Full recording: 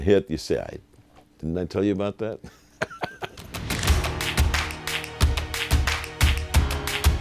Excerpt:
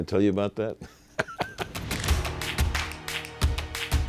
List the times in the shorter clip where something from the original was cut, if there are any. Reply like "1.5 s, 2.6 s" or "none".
1.7 s